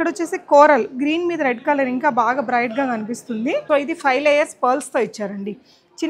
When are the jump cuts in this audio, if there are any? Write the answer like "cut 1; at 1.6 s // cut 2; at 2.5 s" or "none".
cut 1; at 3.6 s